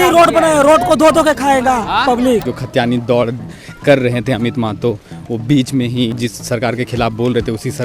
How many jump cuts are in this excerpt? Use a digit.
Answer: 2